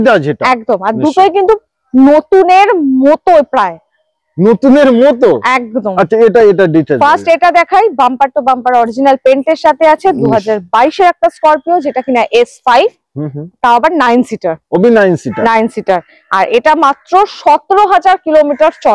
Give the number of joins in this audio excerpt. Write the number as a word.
zero